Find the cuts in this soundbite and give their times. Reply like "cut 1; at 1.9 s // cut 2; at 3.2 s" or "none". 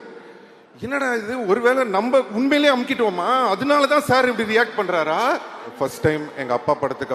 cut 1; at 5.7 s